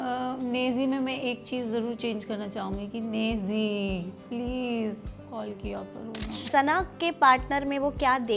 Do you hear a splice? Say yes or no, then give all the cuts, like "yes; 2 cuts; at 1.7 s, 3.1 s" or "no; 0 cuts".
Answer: yes; 1 cut; at 6.5 s